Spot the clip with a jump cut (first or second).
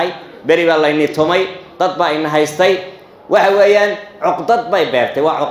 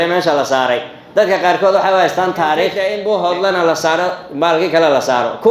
second